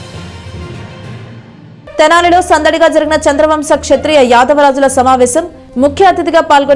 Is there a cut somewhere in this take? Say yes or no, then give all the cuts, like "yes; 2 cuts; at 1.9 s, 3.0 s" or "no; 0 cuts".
yes; 1 cut; at 1.4 s